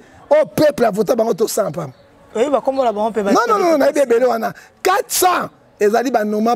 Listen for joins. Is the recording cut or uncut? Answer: uncut